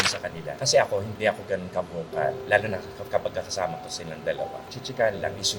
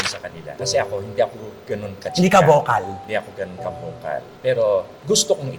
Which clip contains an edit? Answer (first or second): first